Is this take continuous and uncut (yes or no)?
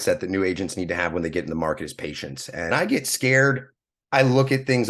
no